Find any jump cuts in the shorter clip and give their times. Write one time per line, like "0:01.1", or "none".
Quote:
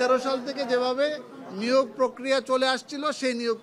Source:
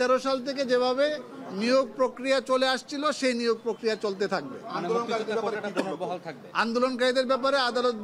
none

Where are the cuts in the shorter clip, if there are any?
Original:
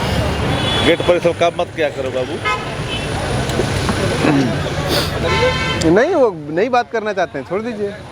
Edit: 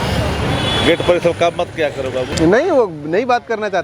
0:02.3

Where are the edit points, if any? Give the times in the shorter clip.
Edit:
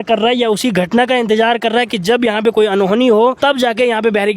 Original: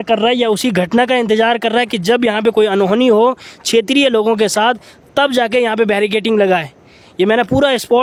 0:03.4

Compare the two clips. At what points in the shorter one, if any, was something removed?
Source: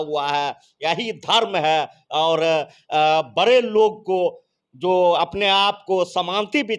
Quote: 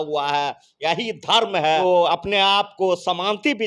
0:01.8

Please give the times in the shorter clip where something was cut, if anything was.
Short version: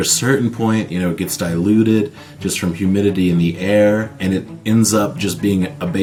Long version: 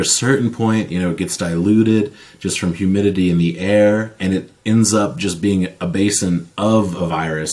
none

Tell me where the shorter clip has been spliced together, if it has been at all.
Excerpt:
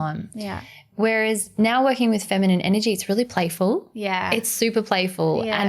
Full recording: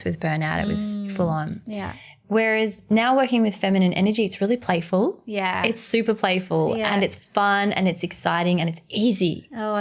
none

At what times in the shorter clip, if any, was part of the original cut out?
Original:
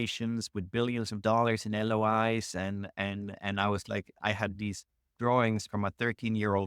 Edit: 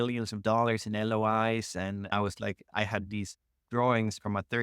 0:02.1

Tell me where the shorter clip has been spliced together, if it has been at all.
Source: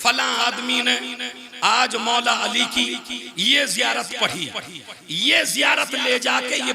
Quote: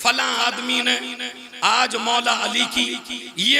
none

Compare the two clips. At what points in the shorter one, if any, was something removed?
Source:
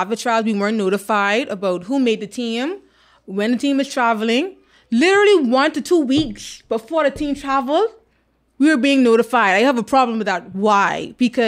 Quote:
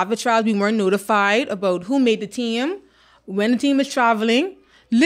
none

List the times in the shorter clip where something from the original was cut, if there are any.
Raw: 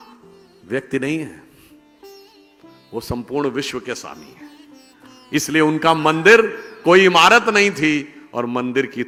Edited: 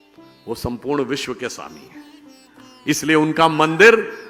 none

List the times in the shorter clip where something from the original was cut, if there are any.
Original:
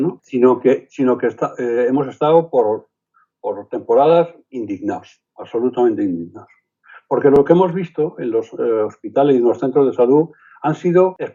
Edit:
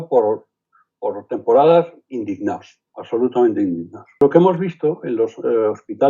0:04.2

